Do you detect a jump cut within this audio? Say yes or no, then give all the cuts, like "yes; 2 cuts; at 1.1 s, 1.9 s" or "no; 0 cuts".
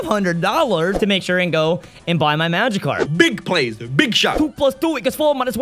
yes; 3 cuts; at 0.9 s, 3.1 s, 4.6 s